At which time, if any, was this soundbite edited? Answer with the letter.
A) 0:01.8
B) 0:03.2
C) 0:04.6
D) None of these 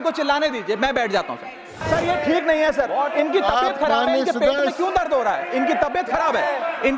A